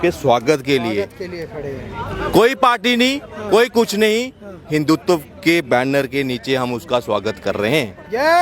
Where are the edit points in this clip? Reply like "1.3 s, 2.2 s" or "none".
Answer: none

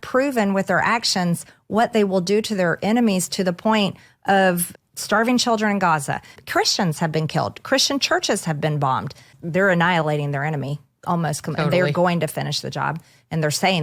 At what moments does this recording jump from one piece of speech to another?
4.7 s, 6.3 s, 9.3 s

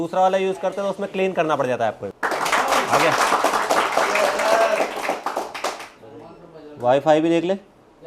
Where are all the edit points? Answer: 2.1 s

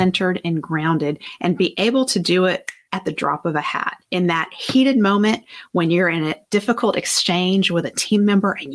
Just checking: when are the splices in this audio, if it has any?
1.3 s, 2.7 s, 4.0 s

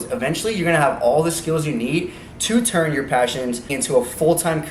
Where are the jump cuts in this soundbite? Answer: 3.7 s

